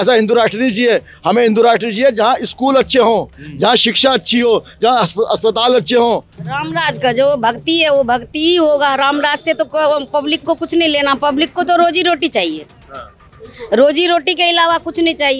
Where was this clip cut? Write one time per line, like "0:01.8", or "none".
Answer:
0:06.4